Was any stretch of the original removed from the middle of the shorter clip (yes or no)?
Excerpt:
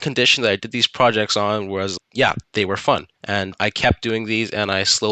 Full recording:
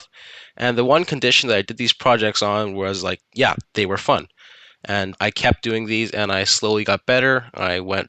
yes